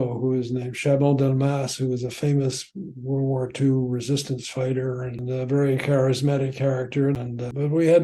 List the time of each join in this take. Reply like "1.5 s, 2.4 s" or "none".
5.2 s, 7.2 s